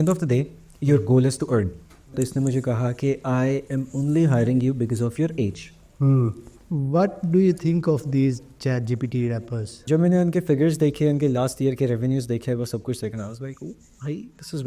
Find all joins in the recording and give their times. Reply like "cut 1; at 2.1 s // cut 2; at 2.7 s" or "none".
cut 1; at 2.1 s // cut 2; at 6.5 s // cut 3; at 9.8 s